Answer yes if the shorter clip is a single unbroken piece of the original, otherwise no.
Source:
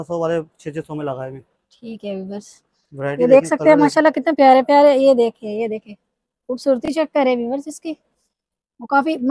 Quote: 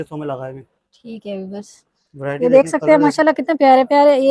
yes